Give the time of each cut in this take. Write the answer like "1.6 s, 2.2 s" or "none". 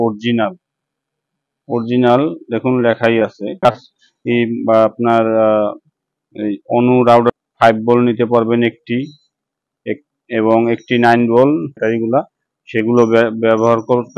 3.5 s, 7.3 s, 11.8 s

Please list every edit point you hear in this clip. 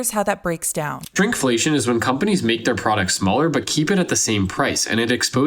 1.0 s

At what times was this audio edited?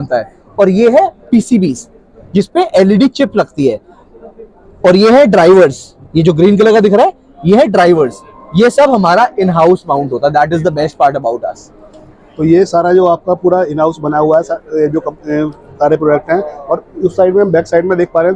none

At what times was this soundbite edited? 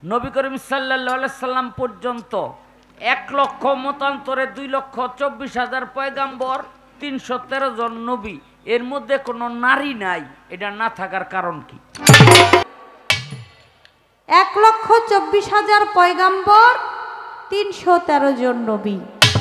12.6 s

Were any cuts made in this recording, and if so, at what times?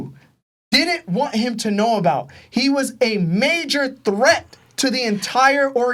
none

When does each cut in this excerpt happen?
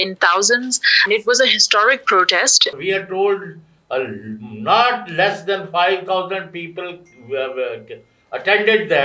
1.0 s, 2.7 s

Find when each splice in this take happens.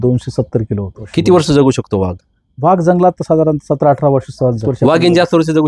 1.0 s, 4.7 s

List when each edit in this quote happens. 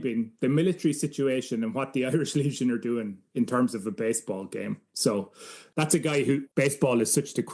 5.6 s, 6.5 s

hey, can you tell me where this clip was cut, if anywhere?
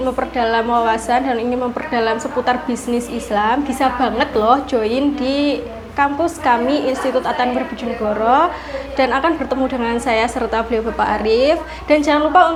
none

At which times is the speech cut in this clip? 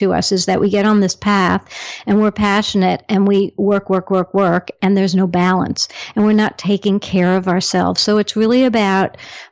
none

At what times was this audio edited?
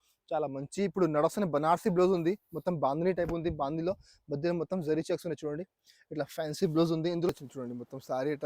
7.3 s

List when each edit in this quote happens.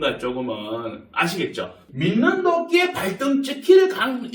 1.8 s

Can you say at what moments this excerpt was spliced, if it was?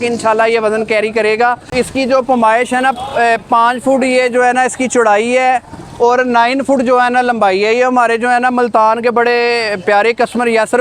1.7 s

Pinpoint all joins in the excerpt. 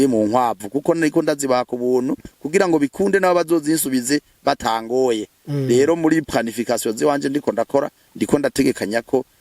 none

